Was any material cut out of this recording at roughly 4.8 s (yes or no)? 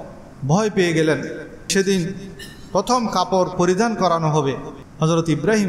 no